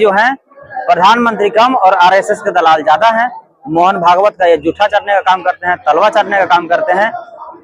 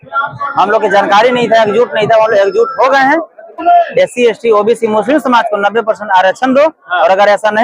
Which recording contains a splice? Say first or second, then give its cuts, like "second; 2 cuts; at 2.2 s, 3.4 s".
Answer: second; 1 cut; at 3.6 s